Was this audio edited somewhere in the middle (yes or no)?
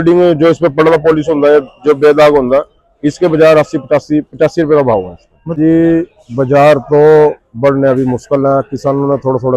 yes